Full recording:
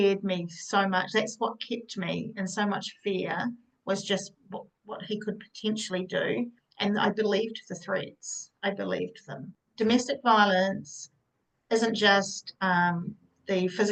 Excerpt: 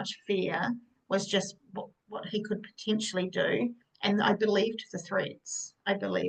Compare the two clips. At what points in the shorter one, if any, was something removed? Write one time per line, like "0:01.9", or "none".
none